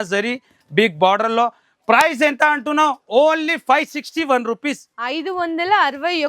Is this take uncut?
yes; 0 cuts

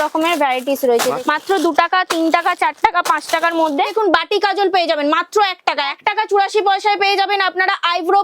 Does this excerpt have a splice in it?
yes; 3 cuts; at 1.2 s, 3.9 s, 6.0 s

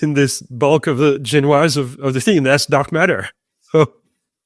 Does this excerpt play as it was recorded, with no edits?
yes; 0 cuts

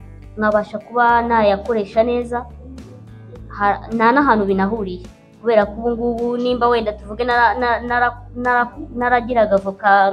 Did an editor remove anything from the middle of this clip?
no; 0 cuts

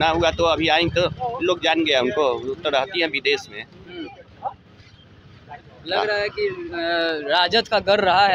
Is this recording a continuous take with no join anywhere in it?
yes; 0 cuts

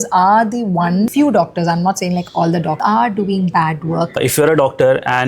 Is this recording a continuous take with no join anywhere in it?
no; 3 cuts; at 1.1 s, 2.8 s, 4.2 s

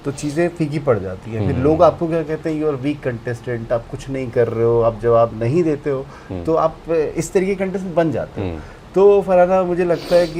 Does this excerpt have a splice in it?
no; 0 cuts

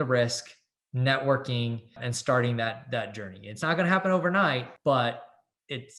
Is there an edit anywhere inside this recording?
yes; 2 cuts; at 2.1 s, 4.7 s

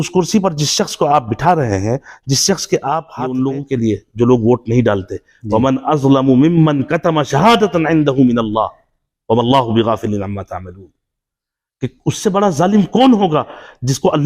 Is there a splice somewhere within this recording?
yes; 1 cut; at 3.4 s

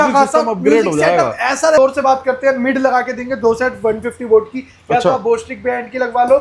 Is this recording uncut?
no; 1 cut; at 1.8 s

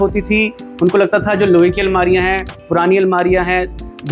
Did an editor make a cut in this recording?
no; 0 cuts

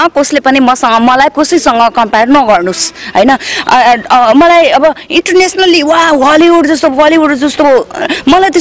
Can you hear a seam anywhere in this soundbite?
no; 0 cuts

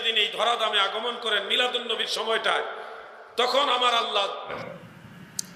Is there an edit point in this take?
yes; 1 cut; at 4.6 s

